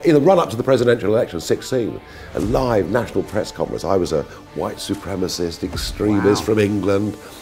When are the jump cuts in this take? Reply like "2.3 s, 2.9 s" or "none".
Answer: none